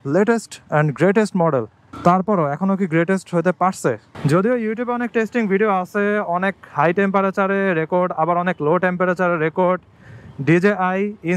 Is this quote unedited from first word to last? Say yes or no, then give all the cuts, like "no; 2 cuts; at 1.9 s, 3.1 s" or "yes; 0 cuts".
no; 1 cut; at 4.1 s